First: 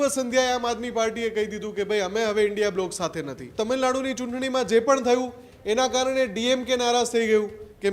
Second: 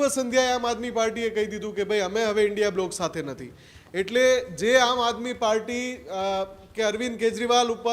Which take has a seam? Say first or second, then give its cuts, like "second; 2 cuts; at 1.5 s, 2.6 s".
first; 1 cut; at 3.4 s